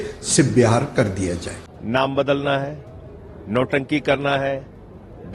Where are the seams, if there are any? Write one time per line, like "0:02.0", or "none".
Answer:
0:01.5